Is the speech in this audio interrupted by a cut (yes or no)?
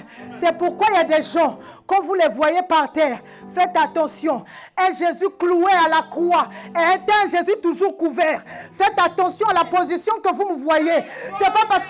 no